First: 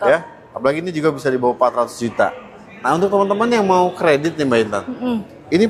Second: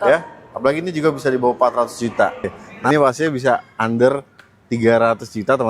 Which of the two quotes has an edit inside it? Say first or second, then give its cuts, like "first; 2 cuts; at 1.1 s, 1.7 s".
second; 1 cut; at 2.7 s